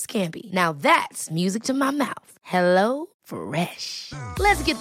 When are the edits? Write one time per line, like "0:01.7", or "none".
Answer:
none